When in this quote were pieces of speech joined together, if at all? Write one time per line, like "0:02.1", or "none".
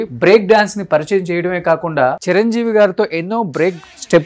0:02.2